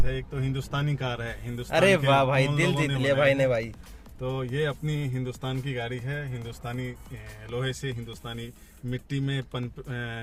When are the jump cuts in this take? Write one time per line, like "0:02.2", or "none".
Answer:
none